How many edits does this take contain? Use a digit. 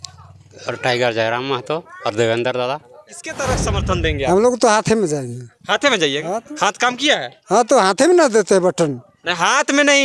1